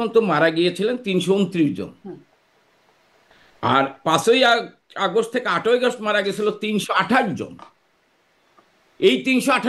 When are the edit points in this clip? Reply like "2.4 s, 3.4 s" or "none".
none

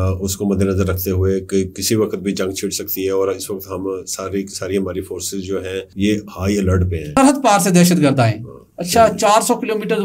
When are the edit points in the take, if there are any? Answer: 5.9 s, 7.2 s

